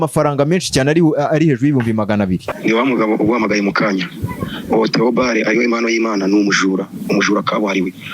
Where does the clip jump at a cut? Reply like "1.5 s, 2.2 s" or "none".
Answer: 2.5 s